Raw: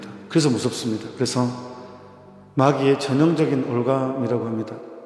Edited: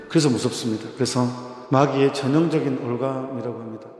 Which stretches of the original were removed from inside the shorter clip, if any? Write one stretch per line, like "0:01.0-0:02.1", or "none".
0:01.7-0:02.3